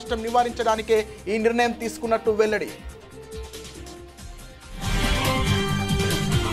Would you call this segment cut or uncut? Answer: uncut